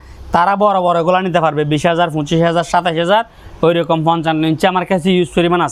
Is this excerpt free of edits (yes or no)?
yes